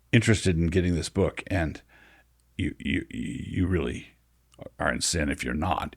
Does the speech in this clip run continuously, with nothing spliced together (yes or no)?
yes